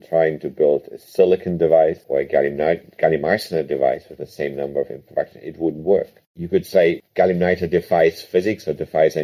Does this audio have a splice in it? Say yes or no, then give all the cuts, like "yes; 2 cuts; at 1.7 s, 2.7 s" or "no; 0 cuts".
yes; 1 cut; at 2.0 s